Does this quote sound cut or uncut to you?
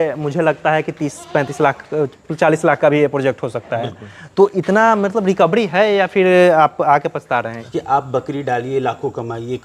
cut